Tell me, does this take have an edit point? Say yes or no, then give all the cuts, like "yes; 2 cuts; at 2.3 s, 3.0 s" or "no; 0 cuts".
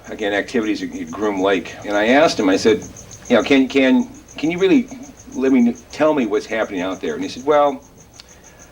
yes; 1 cut; at 2.0 s